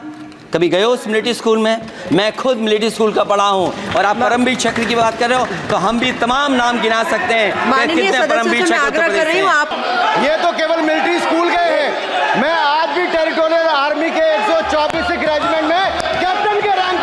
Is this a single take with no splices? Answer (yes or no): no